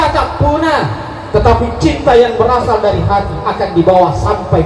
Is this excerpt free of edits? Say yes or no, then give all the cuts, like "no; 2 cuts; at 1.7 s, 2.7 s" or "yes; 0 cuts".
yes; 0 cuts